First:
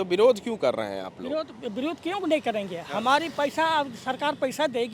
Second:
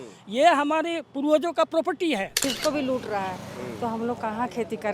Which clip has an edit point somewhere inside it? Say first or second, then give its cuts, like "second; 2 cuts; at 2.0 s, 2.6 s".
second; 1 cut; at 2.4 s